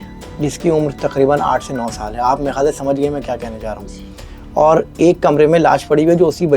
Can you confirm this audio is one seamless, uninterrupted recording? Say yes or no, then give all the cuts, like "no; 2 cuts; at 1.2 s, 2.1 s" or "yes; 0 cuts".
yes; 0 cuts